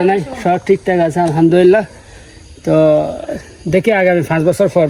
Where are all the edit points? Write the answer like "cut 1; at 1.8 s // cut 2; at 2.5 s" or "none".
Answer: none